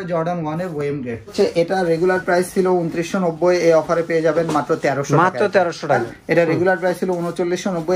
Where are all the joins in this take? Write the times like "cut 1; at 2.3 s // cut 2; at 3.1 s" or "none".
cut 1; at 1.3 s // cut 2; at 6.0 s